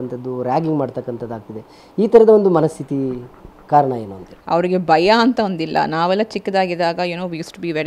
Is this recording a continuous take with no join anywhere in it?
no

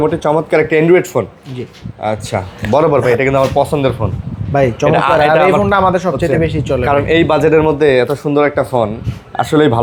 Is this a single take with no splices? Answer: yes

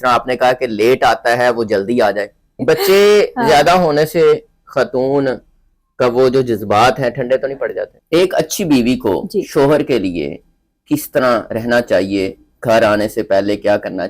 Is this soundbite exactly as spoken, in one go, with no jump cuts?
no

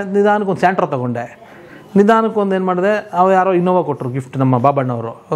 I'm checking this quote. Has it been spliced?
no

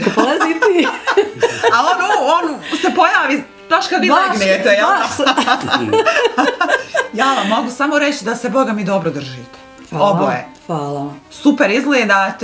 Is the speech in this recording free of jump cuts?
yes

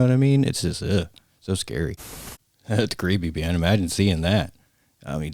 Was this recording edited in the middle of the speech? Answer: yes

